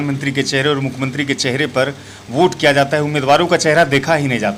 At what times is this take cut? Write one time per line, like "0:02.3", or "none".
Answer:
none